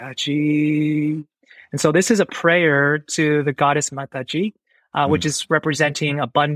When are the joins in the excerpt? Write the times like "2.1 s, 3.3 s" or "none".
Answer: none